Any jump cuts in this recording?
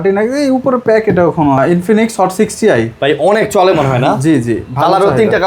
yes; 1 cut; at 1.6 s

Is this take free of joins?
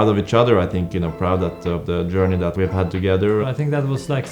no; 2 cuts; at 2.5 s, 3.4 s

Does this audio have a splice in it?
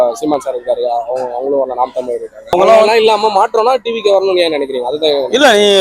yes; 1 cut; at 2.5 s

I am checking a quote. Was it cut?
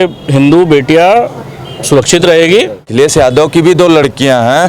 yes; 1 cut; at 2.8 s

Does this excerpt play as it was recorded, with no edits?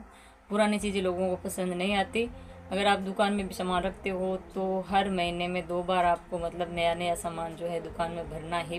yes; 0 cuts

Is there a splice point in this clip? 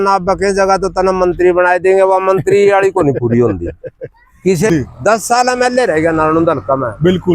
yes; 1 cut; at 4.7 s

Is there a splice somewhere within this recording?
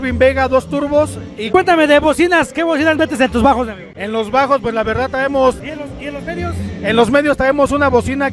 yes; 2 cuts; at 1.5 s, 5.7 s

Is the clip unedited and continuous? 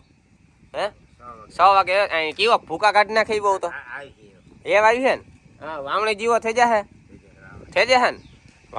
yes; 0 cuts

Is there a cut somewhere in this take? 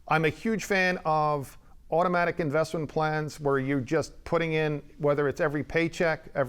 no; 0 cuts

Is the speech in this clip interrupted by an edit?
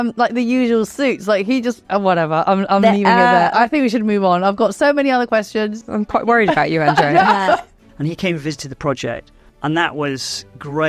yes; 3 cuts; at 1.9 s, 7.8 s, 9.4 s

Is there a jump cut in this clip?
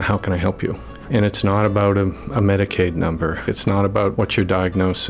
yes; 3 cuts; at 0.9 s, 3.4 s, 4.1 s

